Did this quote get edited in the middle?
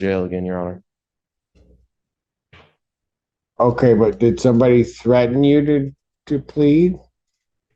no; 0 cuts

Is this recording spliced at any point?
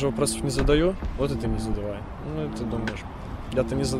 no; 0 cuts

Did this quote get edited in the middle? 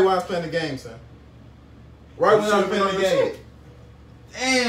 no; 0 cuts

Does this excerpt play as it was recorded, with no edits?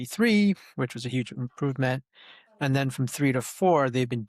yes; 0 cuts

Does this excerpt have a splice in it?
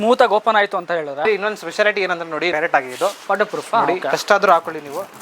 yes; 2 cuts; at 1.3 s, 2.5 s

